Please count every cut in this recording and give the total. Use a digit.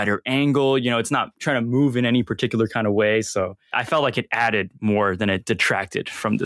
0